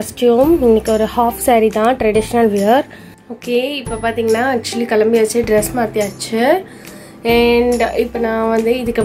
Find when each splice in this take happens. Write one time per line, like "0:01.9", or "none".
0:03.2